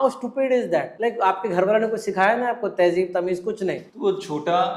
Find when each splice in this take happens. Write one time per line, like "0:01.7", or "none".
0:00.9
0:03.9